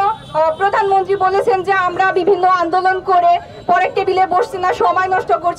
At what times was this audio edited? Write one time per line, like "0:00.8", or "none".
none